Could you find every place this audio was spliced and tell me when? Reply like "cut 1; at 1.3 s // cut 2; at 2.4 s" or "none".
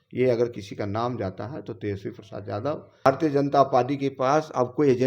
cut 1; at 2.9 s